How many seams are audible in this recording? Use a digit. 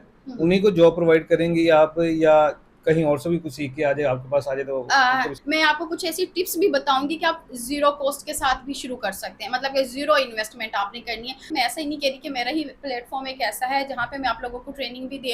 2